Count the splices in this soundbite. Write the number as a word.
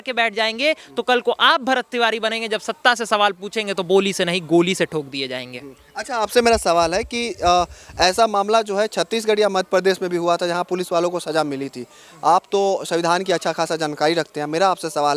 zero